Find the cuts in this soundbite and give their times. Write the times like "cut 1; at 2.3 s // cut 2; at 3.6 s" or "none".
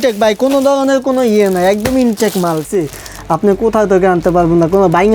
cut 1; at 2.7 s